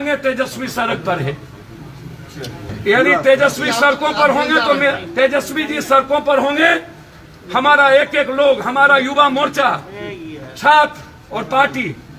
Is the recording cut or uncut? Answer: cut